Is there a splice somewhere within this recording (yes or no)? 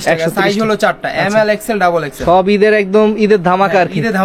no